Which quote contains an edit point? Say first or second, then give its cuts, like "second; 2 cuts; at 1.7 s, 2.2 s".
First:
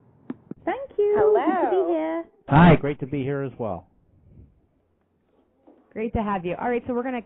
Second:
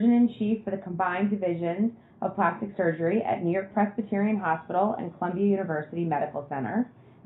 first; 1 cut; at 2.3 s